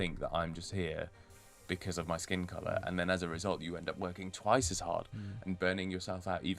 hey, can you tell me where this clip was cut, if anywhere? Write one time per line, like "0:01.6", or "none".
none